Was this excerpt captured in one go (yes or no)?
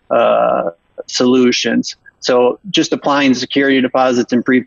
yes